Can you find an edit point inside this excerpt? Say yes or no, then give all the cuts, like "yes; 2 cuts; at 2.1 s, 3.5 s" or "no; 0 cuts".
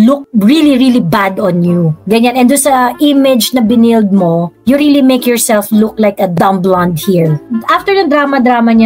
yes; 2 cuts; at 6.3 s, 7.5 s